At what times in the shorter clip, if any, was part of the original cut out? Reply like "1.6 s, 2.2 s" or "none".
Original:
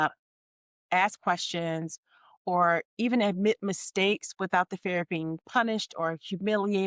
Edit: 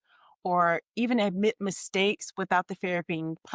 none